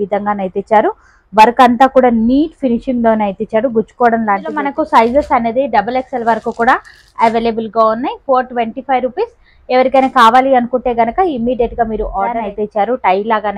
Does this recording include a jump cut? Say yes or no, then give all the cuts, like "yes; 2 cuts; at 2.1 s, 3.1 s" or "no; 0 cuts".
yes; 2 cuts; at 4.6 s, 12.3 s